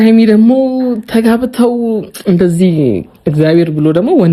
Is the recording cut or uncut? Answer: uncut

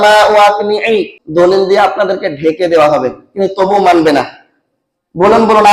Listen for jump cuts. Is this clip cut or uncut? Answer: cut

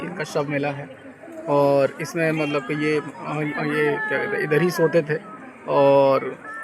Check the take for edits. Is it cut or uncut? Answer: uncut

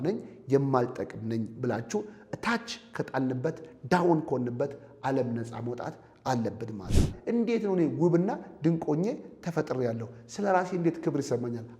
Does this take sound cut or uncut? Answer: cut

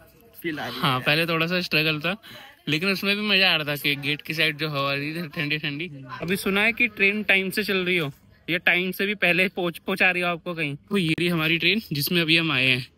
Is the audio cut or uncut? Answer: cut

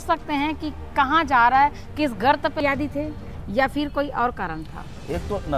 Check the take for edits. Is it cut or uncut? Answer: cut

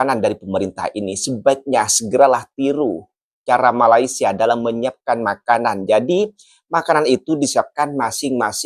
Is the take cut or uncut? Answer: uncut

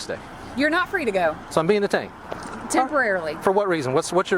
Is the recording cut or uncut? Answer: cut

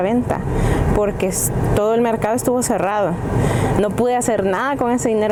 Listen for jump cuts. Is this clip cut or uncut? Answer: uncut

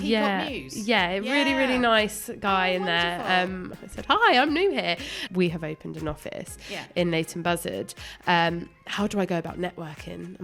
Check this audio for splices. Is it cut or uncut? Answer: cut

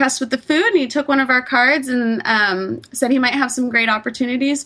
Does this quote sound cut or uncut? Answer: uncut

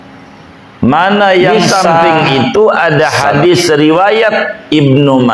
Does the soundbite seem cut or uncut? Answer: cut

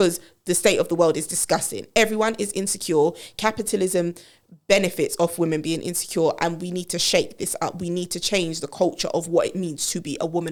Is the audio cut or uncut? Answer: uncut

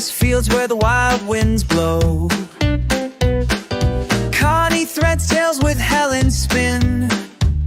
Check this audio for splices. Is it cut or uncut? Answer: uncut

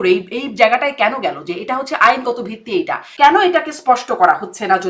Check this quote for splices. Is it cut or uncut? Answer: cut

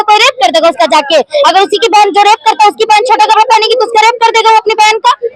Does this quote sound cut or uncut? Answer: uncut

